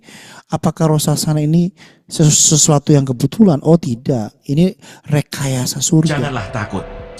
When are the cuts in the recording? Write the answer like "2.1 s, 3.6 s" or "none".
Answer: 6.1 s